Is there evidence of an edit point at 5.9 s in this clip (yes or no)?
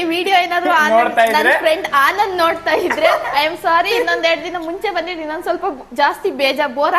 no